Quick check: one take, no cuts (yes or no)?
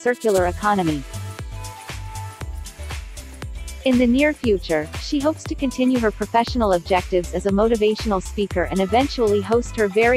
no